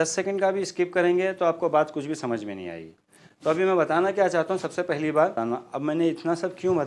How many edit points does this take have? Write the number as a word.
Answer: one